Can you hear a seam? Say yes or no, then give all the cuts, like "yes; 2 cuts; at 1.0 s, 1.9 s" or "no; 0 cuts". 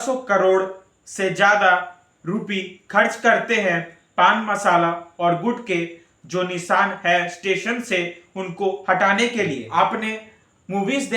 yes; 1 cut; at 9.6 s